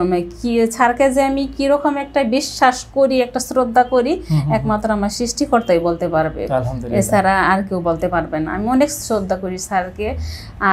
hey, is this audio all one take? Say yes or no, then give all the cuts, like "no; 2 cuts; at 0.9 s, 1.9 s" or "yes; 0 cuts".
yes; 0 cuts